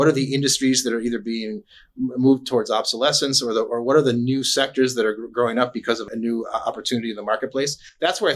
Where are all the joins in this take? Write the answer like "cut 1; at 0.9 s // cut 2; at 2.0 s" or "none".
cut 1; at 6.0 s